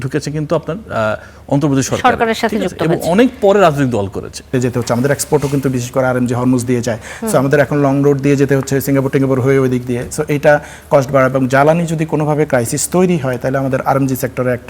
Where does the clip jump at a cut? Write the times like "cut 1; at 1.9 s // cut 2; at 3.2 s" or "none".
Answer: cut 1; at 4.5 s